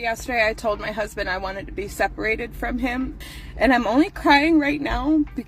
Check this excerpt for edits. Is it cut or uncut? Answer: cut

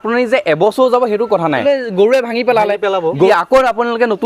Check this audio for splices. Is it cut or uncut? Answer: cut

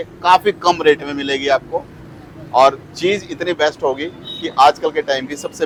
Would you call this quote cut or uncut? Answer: uncut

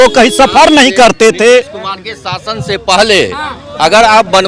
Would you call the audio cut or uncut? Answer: uncut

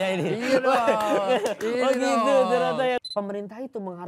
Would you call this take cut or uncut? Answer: cut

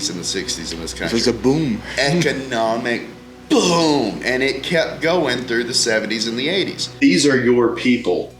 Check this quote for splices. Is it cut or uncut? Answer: cut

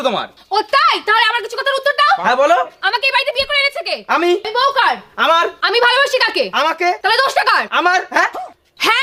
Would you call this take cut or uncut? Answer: uncut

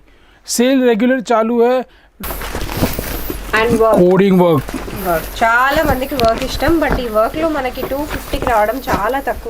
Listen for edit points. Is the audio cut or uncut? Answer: cut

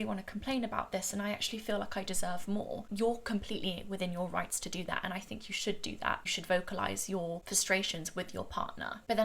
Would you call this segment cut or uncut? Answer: uncut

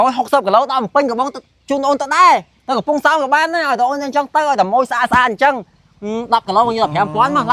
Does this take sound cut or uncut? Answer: uncut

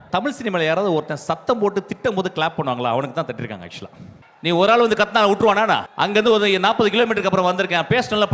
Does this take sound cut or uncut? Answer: cut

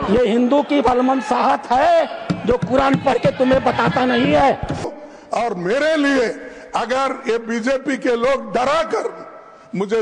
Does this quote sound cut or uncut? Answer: cut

